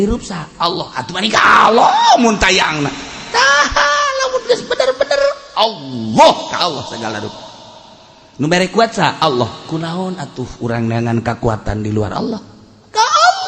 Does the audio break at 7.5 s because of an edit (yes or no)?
no